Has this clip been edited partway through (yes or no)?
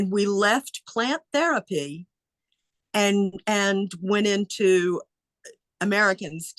no